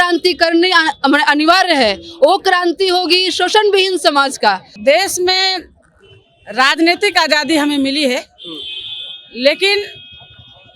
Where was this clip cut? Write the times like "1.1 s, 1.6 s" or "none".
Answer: 4.7 s